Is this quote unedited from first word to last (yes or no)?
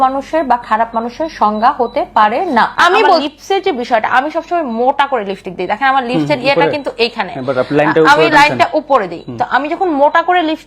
no